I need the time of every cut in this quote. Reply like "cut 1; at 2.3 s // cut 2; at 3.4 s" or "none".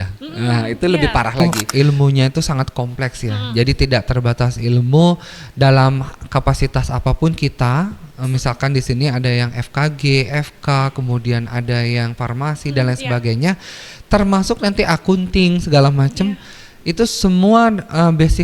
cut 1; at 1.4 s